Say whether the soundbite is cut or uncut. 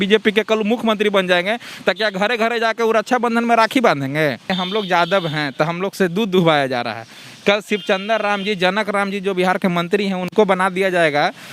cut